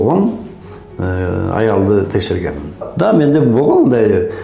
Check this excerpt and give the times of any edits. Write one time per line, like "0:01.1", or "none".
0:02.9